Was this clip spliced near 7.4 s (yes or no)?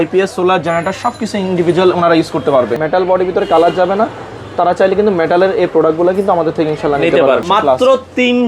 yes